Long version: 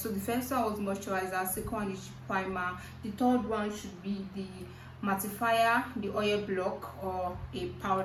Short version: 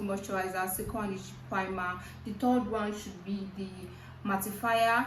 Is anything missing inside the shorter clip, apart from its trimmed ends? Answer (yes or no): no